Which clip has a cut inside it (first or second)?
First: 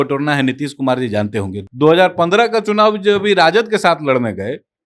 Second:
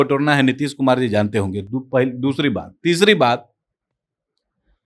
first